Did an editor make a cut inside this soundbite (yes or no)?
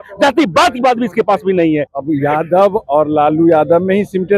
yes